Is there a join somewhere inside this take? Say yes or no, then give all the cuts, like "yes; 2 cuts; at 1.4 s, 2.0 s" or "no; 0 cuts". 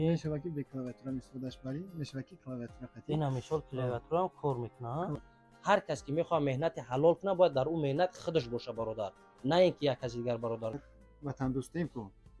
yes; 2 cuts; at 5.3 s, 10.8 s